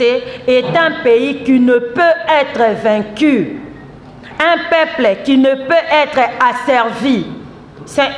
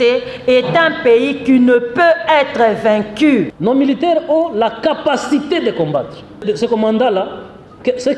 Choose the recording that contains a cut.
second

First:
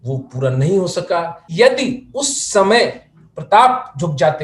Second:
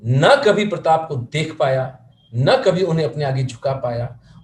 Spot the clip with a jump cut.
first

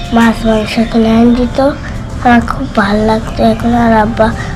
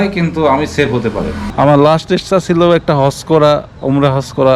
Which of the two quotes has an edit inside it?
second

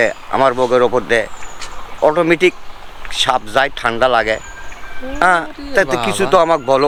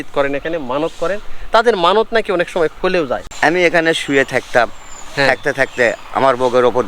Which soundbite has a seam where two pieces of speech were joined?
second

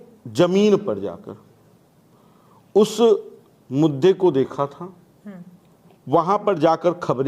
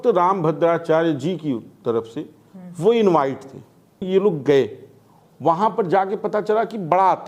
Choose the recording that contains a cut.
second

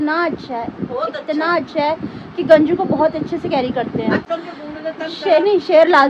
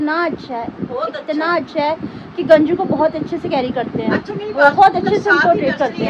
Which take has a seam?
first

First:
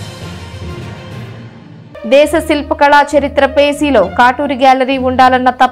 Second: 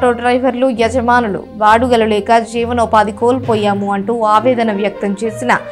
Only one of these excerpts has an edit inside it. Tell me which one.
first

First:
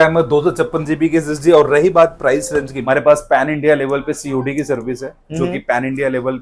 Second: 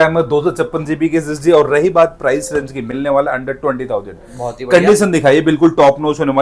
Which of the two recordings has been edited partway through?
first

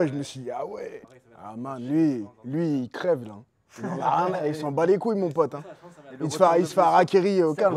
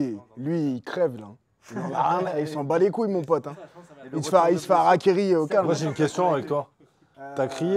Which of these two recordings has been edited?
first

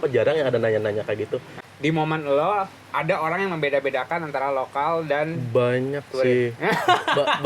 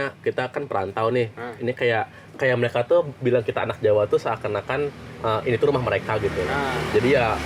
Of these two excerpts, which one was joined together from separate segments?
first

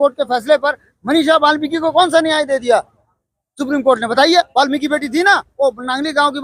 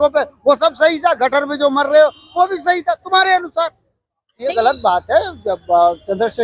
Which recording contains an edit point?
second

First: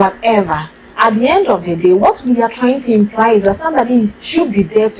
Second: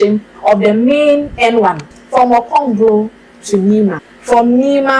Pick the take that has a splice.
second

